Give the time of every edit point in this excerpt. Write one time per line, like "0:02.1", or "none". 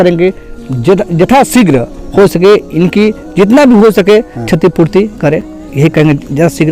none